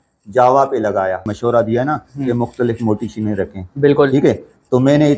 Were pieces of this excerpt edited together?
yes; 1 cut; at 1.3 s

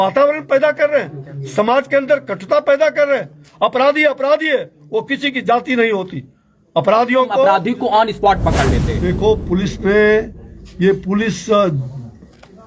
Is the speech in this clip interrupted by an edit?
yes; 1 cut; at 7.5 s

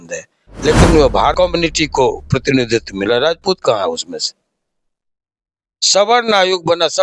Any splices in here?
yes; 1 cut; at 1.3 s

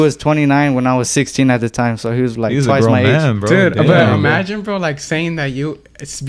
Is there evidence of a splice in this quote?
no; 0 cuts

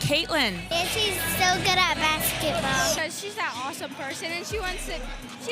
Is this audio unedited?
yes; 0 cuts

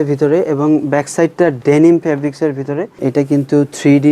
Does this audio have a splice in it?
yes; 1 cut; at 3.1 s

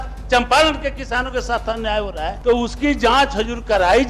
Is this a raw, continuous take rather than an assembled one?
no; 1 cut; at 2.4 s

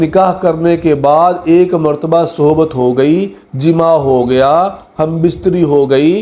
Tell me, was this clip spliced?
no; 0 cuts

